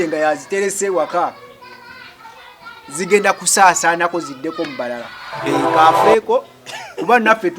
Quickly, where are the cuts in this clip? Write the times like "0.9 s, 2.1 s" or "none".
5.4 s